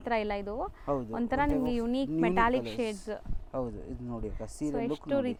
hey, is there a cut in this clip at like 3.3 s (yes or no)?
no